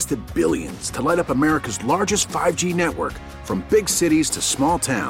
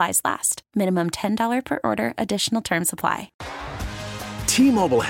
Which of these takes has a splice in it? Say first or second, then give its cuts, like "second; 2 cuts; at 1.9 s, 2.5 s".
second; 1 cut; at 3.4 s